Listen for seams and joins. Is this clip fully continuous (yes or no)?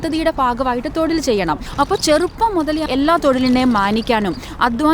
no